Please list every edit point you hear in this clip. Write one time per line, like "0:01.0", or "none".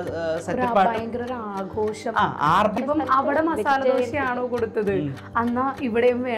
0:02.7